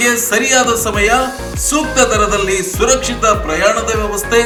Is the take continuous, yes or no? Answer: yes